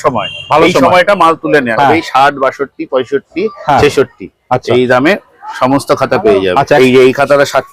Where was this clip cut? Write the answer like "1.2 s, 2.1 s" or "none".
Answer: 1.7 s, 6.8 s